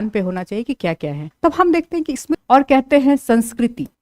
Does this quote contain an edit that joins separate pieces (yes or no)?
yes